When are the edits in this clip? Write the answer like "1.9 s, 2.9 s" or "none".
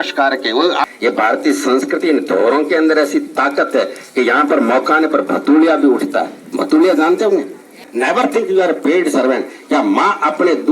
0.9 s, 7.9 s

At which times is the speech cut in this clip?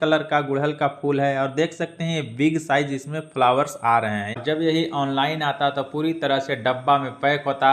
4.4 s

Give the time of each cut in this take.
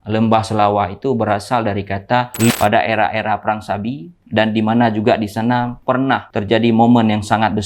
2.5 s

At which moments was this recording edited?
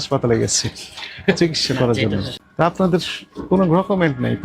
2.4 s

